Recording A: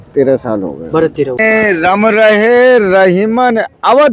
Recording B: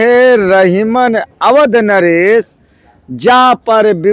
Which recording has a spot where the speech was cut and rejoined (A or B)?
A